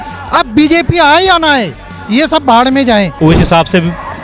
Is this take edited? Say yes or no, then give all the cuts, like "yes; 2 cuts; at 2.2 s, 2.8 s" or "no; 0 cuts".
yes; 1 cut; at 3.1 s